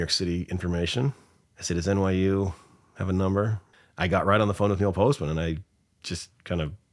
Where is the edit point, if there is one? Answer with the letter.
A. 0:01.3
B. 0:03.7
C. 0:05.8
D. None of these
B